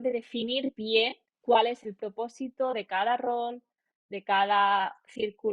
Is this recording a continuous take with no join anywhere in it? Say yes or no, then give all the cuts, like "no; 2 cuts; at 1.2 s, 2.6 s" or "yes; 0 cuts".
no; 1 cut; at 1.3 s